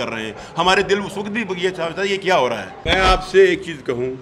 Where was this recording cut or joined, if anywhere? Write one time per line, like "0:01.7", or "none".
0:02.8